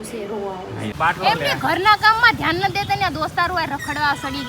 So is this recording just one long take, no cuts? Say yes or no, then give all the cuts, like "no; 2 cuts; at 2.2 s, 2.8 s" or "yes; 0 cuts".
no; 1 cut; at 0.9 s